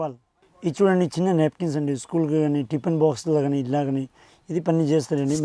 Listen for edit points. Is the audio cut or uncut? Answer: uncut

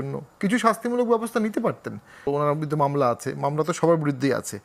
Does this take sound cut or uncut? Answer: cut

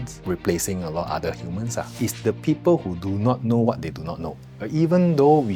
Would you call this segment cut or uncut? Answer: cut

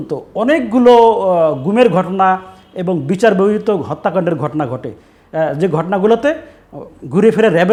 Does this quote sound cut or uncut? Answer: uncut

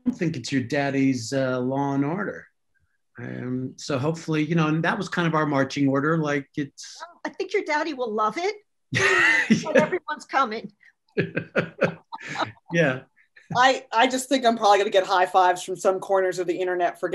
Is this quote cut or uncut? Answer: cut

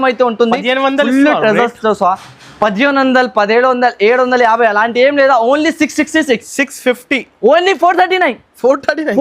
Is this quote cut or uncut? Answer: cut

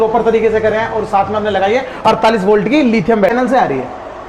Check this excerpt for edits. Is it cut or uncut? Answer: cut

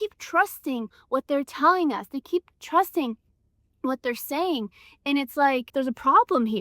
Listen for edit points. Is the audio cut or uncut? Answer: cut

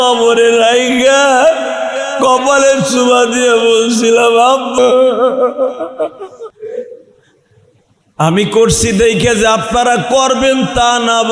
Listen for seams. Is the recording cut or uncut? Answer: cut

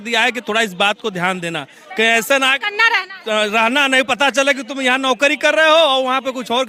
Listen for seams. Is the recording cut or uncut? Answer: uncut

